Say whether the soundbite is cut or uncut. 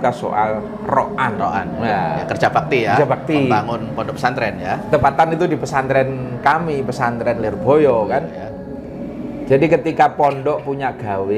uncut